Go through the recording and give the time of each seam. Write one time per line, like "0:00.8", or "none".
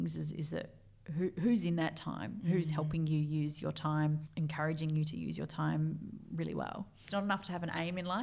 0:07.0